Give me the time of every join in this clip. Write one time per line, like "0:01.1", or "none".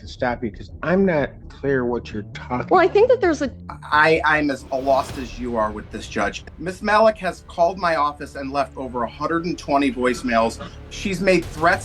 0:03.5
0:06.4
0:10.7